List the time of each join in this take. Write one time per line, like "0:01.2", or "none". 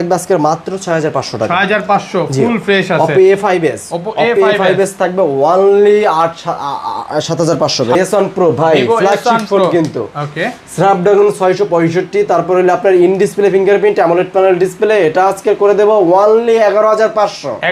0:08.0

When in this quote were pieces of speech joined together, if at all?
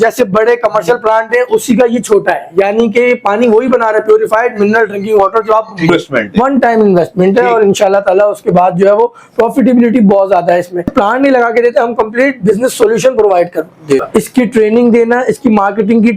0:05.9
0:10.9
0:14.1

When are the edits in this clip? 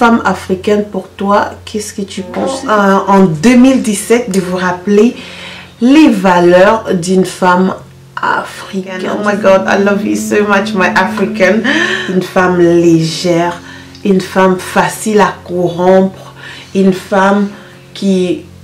0:02.6
0:09.1
0:11.9

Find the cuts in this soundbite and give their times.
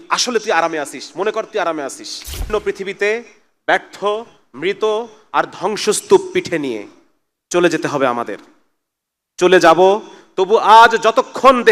0:02.5

